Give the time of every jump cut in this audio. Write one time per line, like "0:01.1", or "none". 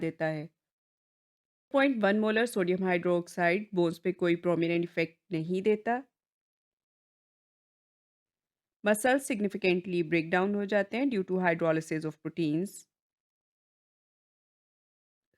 0:01.7